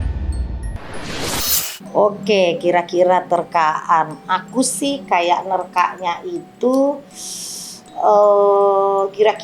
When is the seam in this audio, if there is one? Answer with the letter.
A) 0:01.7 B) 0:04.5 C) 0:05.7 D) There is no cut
A